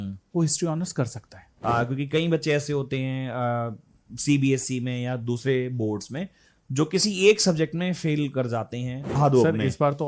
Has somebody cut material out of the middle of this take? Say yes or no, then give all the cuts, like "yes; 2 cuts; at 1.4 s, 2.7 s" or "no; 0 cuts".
yes; 2 cuts; at 1.5 s, 9.2 s